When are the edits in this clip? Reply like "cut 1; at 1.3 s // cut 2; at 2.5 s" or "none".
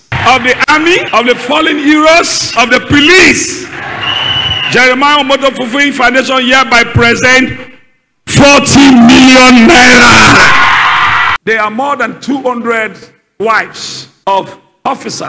cut 1; at 1.1 s // cut 2; at 2.4 s